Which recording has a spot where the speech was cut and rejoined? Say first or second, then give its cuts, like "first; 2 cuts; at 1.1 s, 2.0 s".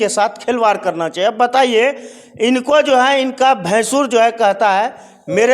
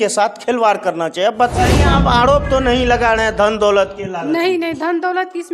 second; 1 cut; at 1.5 s